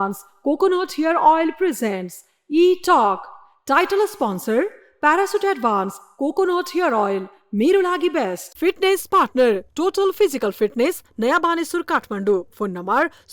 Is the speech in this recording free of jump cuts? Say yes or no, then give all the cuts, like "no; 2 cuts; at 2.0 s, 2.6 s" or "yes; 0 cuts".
yes; 0 cuts